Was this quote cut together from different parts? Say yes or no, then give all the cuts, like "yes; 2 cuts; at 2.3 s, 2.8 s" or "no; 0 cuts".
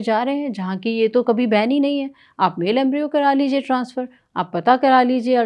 no; 0 cuts